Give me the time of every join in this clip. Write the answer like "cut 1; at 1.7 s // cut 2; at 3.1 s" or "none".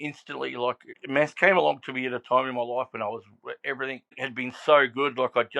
cut 1; at 0.9 s // cut 2; at 4.1 s